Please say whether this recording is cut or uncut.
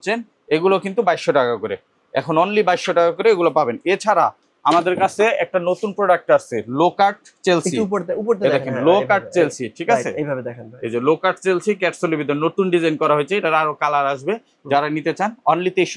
uncut